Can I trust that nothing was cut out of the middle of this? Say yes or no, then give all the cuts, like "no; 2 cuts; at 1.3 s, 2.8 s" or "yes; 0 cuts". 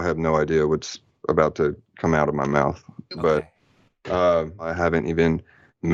no; 1 cut; at 4.7 s